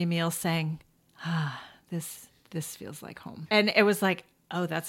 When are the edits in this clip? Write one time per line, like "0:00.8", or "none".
0:03.4